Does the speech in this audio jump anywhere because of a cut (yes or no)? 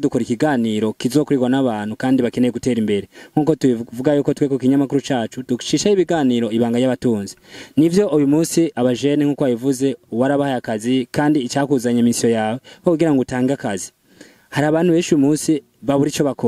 no